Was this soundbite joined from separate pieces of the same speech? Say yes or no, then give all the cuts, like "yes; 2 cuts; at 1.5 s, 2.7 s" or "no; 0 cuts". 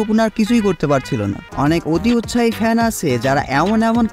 yes; 1 cut; at 1.4 s